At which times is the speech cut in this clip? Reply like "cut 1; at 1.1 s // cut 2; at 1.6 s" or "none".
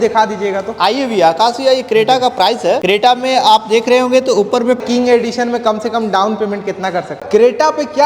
cut 1; at 4.8 s // cut 2; at 7.2 s